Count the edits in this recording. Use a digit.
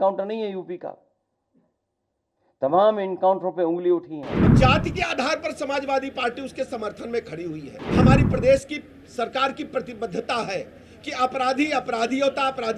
2